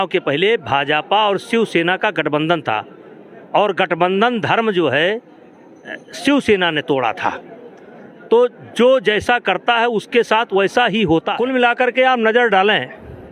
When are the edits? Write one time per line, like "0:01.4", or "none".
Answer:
0:11.3